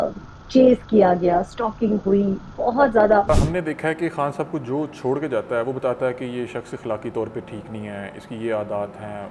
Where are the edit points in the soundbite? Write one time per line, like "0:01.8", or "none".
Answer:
0:03.3